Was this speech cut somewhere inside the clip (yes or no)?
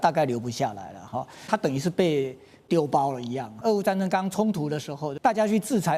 yes